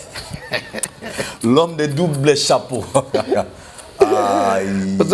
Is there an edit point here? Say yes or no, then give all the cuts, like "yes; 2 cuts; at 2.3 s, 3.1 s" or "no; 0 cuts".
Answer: no; 0 cuts